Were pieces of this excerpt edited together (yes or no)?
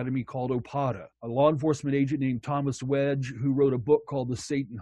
yes